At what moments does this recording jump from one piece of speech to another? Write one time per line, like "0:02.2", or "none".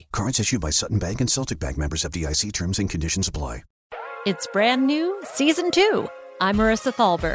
0:03.7